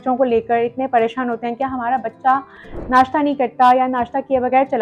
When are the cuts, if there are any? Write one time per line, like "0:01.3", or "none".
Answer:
none